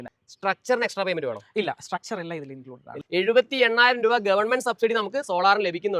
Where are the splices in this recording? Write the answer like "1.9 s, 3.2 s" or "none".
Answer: 2.9 s